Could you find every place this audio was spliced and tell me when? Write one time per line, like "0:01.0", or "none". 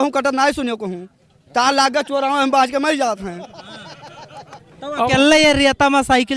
0:04.6